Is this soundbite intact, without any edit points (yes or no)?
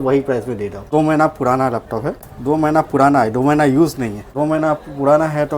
no